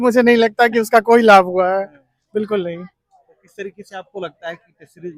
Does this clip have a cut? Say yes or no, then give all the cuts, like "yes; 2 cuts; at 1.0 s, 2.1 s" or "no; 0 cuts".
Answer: no; 0 cuts